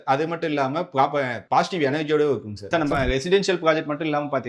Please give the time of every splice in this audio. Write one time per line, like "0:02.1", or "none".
0:02.6